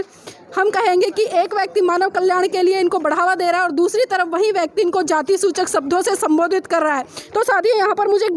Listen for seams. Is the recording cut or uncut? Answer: uncut